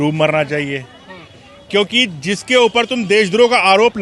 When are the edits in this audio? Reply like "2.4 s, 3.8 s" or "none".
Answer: none

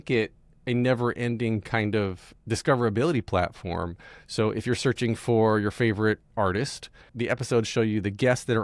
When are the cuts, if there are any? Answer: 2.3 s, 7.1 s

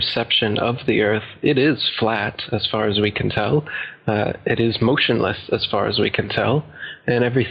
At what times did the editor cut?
1.3 s

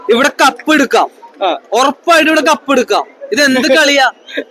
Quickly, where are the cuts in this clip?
none

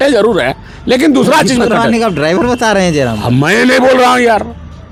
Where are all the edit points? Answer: none

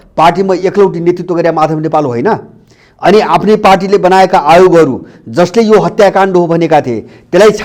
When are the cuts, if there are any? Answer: none

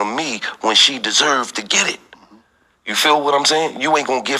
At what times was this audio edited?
none

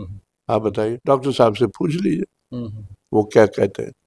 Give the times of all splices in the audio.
1.0 s

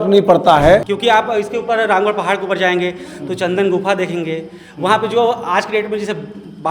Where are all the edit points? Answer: 0.9 s

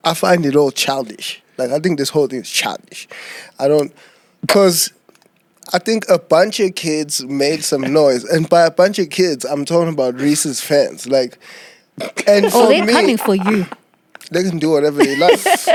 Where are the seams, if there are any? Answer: none

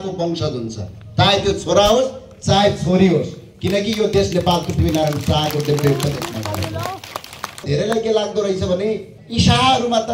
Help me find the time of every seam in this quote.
7.6 s, 9.2 s

